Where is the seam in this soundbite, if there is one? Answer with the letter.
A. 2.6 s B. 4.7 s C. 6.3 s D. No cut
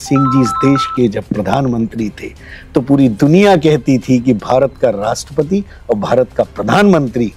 D